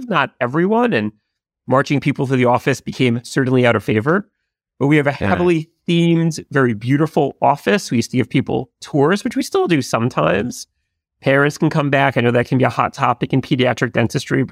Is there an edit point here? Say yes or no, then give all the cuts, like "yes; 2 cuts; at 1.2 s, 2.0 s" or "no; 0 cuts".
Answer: no; 0 cuts